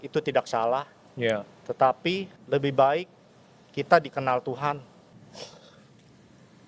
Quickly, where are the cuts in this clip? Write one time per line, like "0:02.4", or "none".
0:02.3
0:05.1